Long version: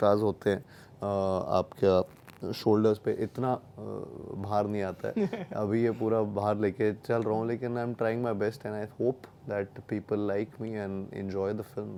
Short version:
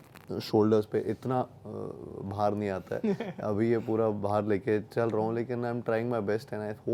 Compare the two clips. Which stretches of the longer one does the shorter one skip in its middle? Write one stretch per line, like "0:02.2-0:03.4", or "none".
none